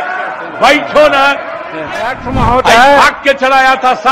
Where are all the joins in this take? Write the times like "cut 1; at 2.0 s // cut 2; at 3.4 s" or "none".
cut 1; at 2.2 s